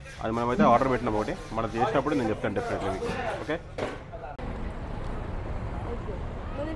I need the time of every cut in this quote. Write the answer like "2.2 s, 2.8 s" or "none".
4.4 s